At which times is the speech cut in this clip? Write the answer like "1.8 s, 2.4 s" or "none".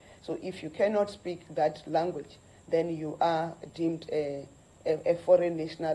none